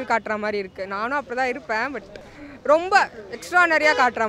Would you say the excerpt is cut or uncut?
uncut